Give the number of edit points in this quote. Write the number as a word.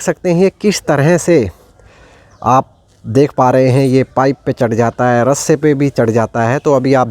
zero